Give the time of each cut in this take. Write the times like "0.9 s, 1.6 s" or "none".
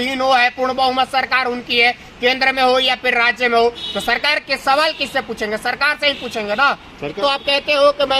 7.2 s